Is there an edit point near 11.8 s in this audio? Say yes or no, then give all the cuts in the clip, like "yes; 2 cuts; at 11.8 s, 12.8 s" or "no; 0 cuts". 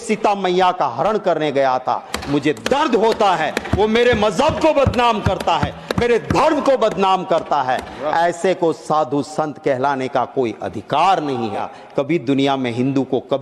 yes; 2 cuts; at 2.1 s, 11.8 s